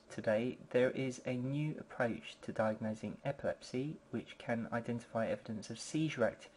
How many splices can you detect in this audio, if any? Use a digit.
1